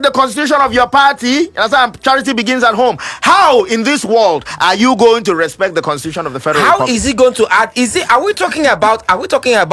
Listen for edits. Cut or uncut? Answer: uncut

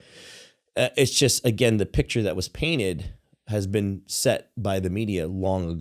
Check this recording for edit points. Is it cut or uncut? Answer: uncut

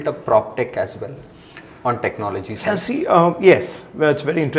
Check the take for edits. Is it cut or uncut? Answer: uncut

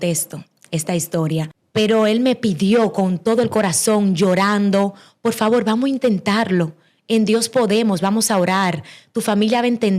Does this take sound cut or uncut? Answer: cut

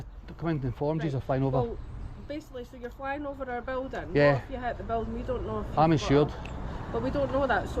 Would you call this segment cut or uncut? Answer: uncut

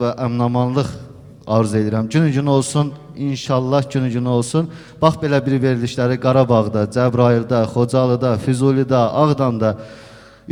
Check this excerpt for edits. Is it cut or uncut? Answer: uncut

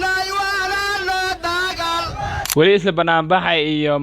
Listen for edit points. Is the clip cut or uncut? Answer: cut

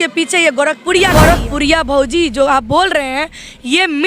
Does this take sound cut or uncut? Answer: cut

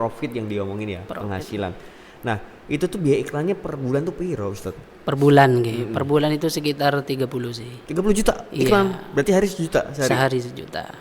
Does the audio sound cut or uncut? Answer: uncut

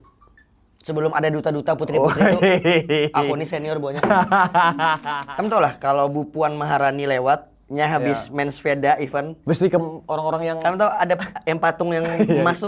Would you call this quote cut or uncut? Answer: cut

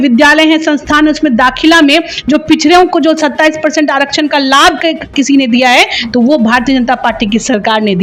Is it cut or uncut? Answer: uncut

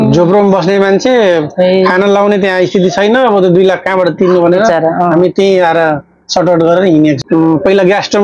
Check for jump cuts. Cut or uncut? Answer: cut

